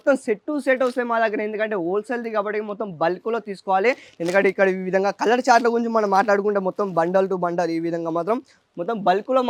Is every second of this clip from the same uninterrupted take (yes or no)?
yes